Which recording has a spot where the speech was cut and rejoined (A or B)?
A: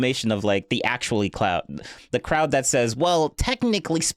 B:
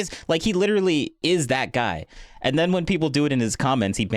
B